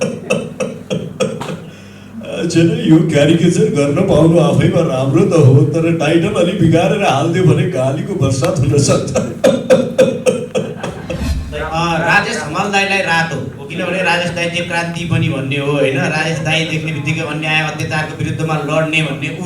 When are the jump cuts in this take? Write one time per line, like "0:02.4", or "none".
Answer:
0:11.2